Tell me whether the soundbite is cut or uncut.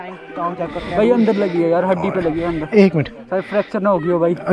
uncut